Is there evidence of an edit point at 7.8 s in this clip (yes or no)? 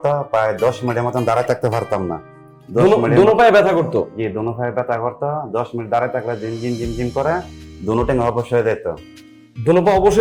no